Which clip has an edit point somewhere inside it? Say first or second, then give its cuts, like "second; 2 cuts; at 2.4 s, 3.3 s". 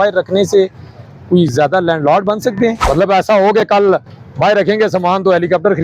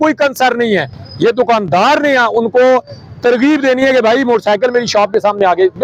first; 1 cut; at 2.8 s